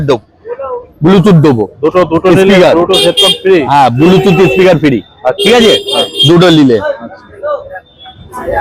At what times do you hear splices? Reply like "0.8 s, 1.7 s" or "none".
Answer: none